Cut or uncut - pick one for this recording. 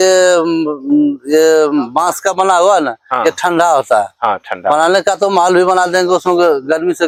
uncut